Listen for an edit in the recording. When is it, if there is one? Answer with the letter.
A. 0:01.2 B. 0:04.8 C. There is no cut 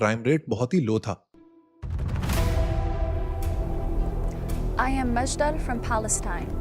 A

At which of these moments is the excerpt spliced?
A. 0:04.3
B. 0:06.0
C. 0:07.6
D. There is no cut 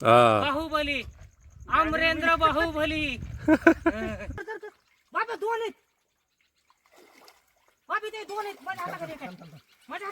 A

